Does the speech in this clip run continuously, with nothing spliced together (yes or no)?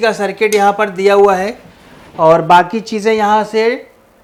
yes